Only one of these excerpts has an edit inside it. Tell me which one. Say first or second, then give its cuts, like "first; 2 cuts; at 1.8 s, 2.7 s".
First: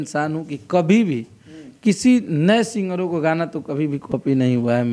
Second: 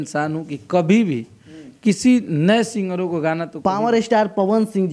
second; 1 cut; at 3.8 s